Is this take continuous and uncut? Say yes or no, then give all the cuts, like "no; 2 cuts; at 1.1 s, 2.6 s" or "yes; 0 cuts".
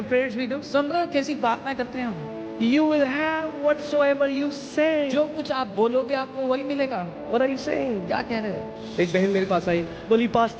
no; 1 cut; at 8.8 s